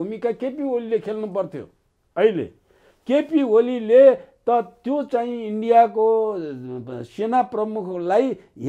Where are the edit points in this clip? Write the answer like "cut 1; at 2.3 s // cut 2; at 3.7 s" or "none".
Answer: none